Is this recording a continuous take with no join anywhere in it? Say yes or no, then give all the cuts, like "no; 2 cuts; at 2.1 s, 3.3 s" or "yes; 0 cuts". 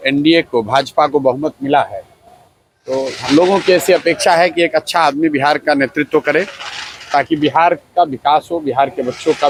yes; 0 cuts